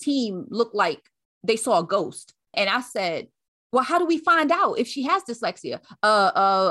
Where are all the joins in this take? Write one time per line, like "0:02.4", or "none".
0:02.5